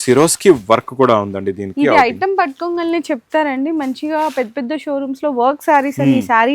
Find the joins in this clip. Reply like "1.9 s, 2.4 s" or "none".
none

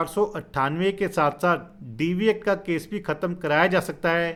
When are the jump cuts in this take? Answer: none

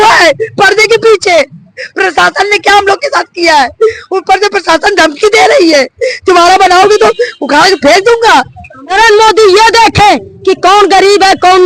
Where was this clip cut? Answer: 8.8 s

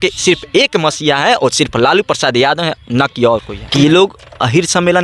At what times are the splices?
3.6 s

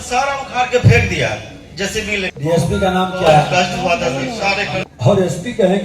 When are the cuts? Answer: 2.3 s, 4.8 s

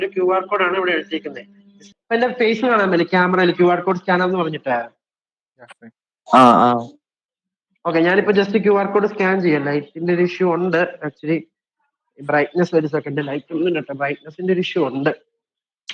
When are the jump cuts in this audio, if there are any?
1.9 s

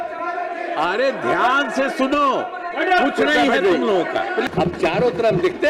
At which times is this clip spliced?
4.4 s

